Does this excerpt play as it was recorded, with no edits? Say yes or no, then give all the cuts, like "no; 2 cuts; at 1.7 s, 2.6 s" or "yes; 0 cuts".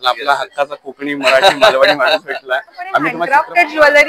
no; 1 cut; at 3.2 s